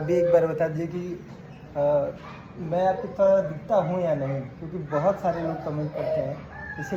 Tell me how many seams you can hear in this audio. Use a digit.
0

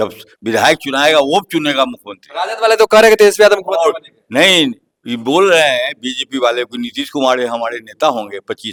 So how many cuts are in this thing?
0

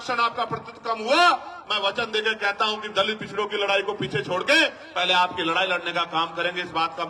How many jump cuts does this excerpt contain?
0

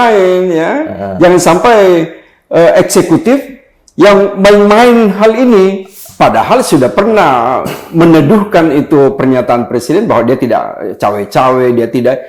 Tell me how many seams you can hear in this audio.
1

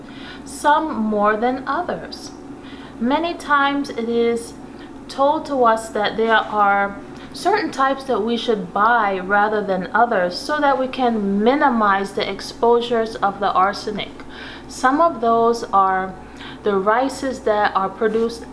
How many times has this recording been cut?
0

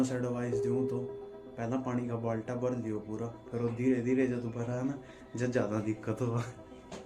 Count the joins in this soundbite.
0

